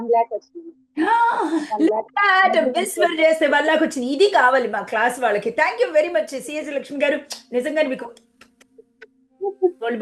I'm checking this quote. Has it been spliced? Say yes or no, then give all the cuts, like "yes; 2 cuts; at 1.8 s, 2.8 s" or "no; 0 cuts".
no; 0 cuts